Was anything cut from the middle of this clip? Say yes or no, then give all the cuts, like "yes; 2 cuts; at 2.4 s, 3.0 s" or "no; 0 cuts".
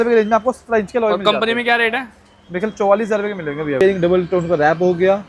yes; 1 cut; at 3.8 s